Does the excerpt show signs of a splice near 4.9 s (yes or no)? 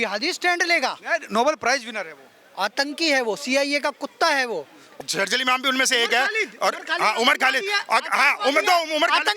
yes